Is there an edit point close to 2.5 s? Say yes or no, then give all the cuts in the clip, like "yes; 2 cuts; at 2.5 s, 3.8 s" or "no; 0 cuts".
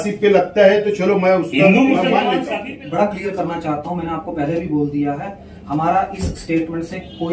yes; 1 cut; at 2.5 s